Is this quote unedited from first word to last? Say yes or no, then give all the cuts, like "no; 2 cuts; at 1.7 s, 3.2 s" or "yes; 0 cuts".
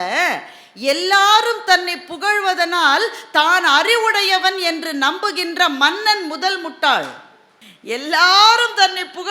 yes; 0 cuts